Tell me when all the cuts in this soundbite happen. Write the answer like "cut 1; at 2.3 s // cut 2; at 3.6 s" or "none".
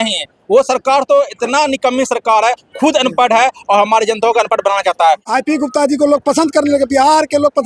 cut 1; at 5.2 s